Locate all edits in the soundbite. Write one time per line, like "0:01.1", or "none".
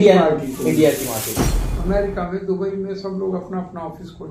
0:01.3